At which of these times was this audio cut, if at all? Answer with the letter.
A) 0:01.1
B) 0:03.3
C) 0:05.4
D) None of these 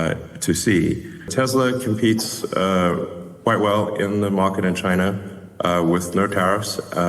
A